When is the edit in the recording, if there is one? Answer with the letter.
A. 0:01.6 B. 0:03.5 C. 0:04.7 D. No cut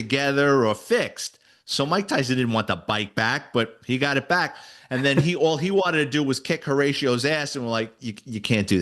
D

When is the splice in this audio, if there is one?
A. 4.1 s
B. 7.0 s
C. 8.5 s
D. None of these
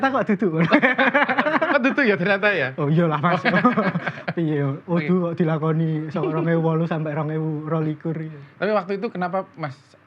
D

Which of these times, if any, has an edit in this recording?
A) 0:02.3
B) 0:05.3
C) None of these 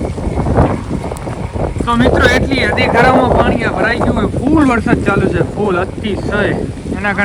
C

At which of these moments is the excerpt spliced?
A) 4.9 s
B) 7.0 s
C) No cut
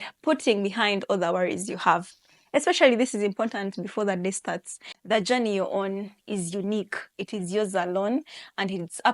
A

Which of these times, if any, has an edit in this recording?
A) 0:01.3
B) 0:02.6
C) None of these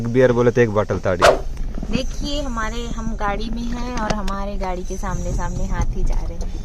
A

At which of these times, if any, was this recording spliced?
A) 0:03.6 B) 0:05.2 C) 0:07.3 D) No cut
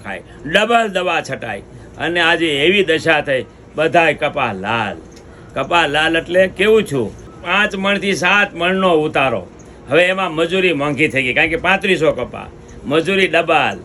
C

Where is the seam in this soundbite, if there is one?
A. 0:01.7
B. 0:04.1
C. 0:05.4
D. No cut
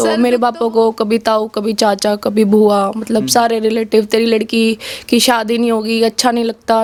D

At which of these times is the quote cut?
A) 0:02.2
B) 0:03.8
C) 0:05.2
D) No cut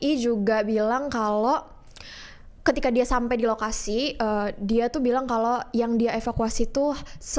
D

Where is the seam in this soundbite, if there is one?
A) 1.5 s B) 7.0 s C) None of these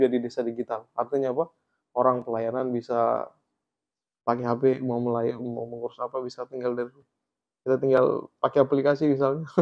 C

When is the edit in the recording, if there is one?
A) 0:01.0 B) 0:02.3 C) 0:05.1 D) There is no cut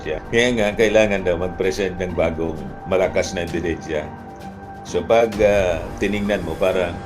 D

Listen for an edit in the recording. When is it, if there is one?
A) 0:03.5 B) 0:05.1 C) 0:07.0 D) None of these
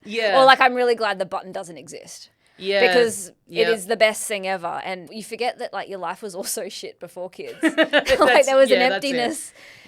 B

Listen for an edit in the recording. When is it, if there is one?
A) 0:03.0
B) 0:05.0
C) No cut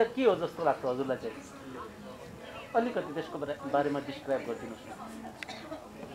C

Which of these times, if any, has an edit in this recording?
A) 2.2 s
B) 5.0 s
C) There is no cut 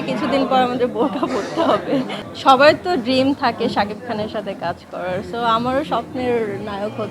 A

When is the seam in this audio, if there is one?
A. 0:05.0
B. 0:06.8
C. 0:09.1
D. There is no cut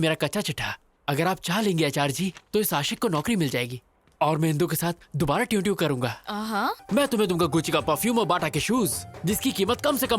B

